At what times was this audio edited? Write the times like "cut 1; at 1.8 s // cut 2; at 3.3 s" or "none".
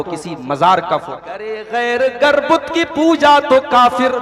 cut 1; at 1.6 s